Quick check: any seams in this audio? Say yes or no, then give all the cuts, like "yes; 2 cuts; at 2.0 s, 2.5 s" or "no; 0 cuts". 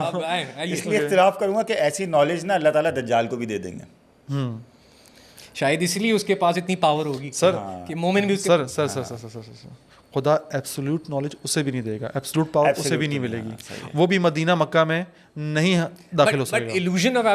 no; 0 cuts